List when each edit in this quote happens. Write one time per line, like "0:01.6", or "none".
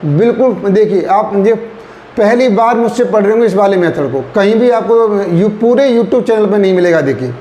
none